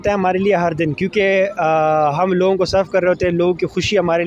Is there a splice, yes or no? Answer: no